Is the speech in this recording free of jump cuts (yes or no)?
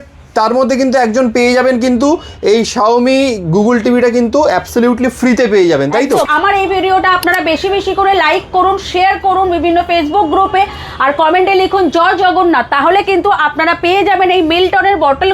no